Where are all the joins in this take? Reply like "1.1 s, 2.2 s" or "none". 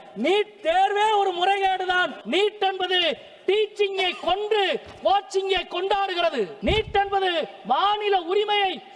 2.2 s, 6.5 s